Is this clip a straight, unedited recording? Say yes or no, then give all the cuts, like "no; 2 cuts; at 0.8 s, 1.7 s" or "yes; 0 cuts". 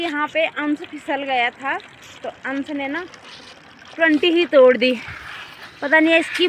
yes; 0 cuts